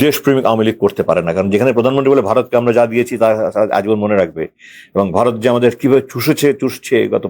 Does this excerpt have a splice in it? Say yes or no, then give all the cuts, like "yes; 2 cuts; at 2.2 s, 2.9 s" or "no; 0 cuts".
no; 0 cuts